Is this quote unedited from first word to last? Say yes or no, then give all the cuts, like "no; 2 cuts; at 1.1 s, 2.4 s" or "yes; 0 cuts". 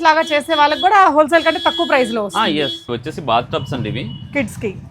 no; 1 cut; at 2.8 s